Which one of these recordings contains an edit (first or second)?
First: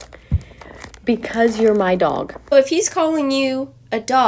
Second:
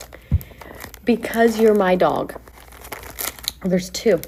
first